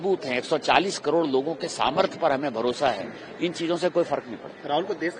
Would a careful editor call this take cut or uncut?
uncut